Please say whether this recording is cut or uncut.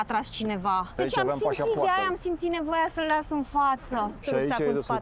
cut